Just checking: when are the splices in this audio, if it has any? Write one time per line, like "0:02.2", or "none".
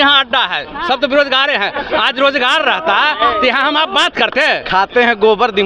0:04.6